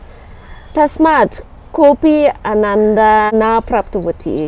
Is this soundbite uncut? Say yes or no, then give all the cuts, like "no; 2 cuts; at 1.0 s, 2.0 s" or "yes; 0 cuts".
no; 1 cut; at 3.3 s